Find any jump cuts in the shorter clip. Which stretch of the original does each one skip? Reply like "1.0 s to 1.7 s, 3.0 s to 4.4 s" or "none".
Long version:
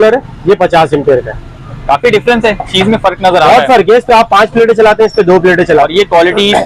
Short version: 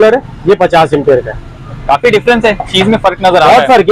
none